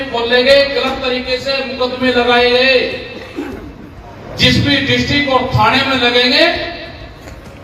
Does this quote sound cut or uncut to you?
uncut